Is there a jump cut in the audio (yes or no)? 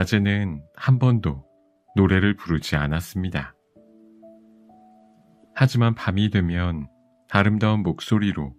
yes